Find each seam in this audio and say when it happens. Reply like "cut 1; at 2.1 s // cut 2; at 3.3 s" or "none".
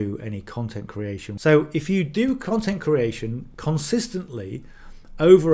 cut 1; at 1.3 s